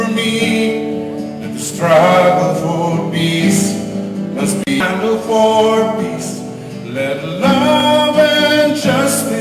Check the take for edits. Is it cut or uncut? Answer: uncut